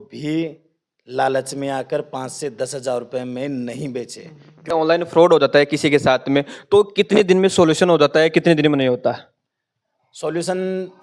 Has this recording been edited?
yes; 1 cut; at 4.7 s

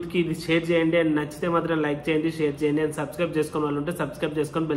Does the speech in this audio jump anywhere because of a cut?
no; 0 cuts

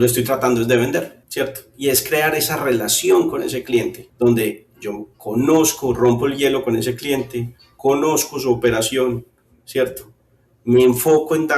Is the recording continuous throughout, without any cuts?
no; 2 cuts; at 1.2 s, 4.0 s

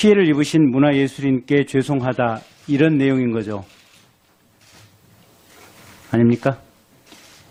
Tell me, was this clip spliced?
no; 0 cuts

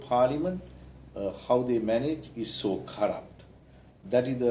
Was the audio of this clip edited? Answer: no; 0 cuts

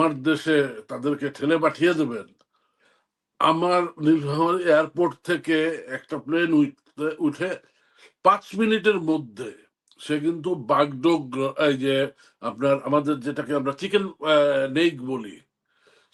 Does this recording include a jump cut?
no; 0 cuts

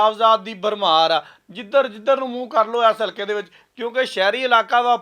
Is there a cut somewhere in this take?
yes; 1 cut; at 1.4 s

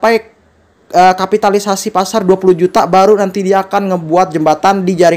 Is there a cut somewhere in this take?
no; 0 cuts

